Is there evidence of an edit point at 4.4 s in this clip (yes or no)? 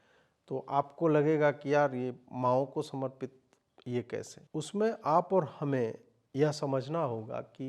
yes